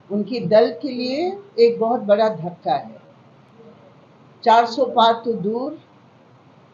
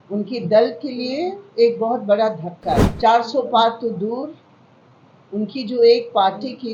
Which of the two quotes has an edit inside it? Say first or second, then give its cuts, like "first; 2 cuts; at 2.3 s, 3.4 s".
second; 1 cut; at 2.9 s